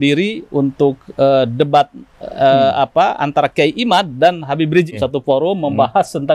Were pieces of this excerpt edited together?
yes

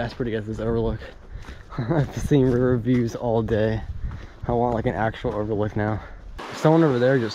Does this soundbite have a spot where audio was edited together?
yes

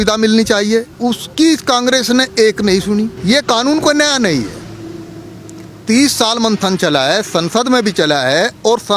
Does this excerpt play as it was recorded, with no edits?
no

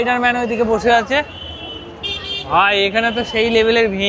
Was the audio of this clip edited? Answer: no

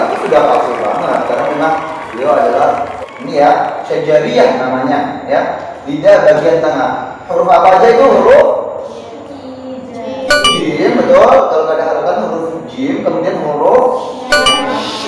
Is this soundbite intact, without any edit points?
no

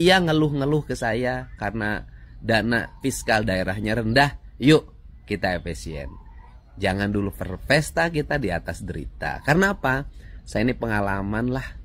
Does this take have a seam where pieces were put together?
no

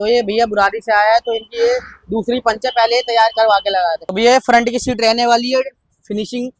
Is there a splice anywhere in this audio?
yes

